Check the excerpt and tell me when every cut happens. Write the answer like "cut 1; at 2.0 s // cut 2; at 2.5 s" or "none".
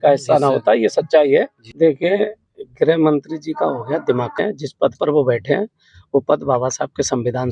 cut 1; at 1.6 s // cut 2; at 4.4 s